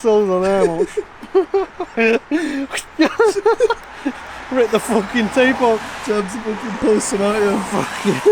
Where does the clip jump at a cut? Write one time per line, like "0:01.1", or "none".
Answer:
none

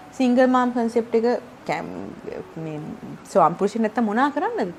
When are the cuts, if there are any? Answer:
none

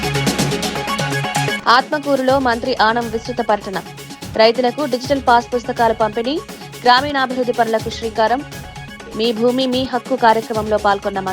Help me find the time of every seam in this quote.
0:01.6

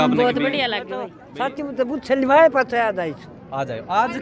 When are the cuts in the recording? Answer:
0:01.2

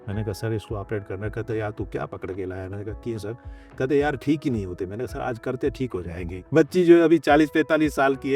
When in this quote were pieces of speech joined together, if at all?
0:06.4

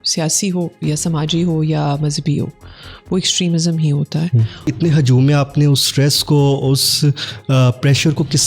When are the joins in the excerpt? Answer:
0:04.7

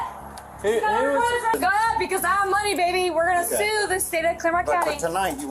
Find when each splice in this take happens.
0:01.5

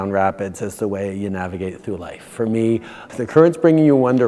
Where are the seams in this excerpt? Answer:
0:03.0

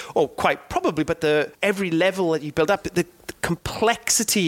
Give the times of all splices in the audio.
0:01.5

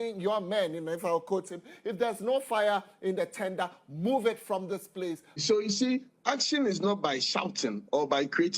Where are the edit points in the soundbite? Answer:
0:05.4

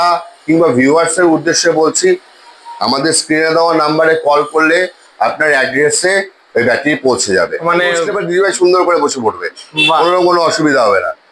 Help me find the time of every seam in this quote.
0:08.1

